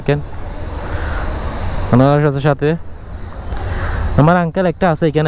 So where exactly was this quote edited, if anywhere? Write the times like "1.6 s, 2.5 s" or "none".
none